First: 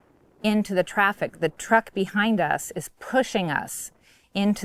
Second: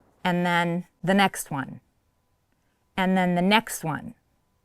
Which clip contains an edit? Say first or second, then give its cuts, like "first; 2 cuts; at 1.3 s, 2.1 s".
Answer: second; 1 cut; at 0.9 s